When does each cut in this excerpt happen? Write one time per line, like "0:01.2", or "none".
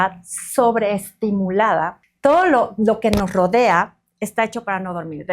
0:02.0